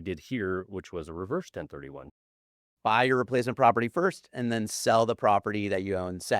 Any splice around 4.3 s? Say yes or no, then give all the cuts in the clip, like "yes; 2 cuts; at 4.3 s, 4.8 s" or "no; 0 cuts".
no; 1 cut; at 2.5 s